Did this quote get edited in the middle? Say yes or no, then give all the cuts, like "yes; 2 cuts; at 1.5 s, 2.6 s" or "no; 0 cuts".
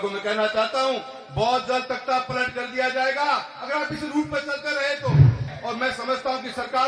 yes; 1 cut; at 5.5 s